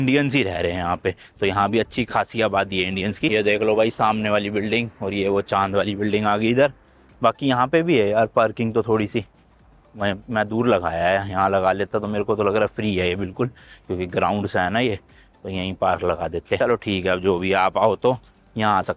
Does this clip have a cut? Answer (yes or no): no